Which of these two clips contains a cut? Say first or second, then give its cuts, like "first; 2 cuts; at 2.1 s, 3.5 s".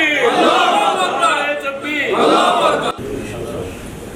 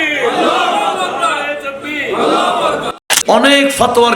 second; 1 cut; at 3.1 s